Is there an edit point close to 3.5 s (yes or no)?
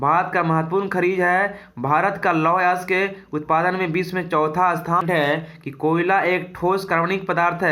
no